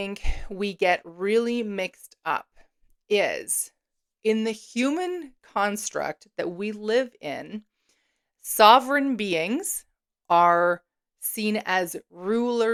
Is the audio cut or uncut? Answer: uncut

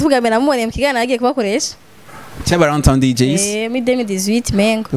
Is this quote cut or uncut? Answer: uncut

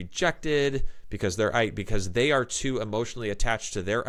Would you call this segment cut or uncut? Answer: uncut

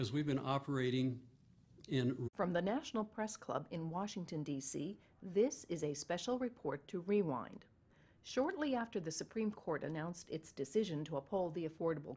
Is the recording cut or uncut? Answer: uncut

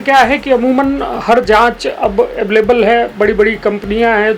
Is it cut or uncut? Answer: uncut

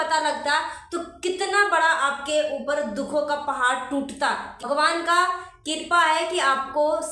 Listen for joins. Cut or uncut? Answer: cut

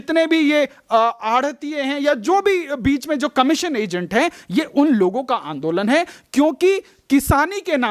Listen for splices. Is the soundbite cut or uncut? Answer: uncut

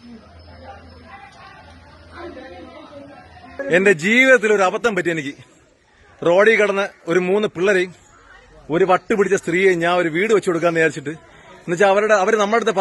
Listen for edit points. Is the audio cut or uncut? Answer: cut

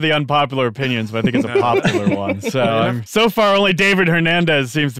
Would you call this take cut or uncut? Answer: cut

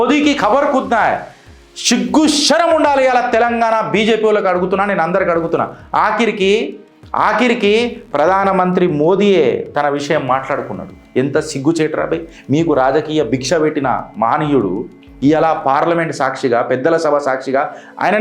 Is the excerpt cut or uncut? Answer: uncut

